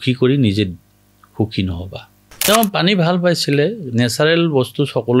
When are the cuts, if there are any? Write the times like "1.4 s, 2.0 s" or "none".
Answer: 2.4 s